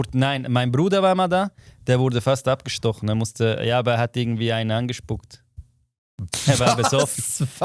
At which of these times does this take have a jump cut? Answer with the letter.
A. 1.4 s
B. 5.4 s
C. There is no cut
C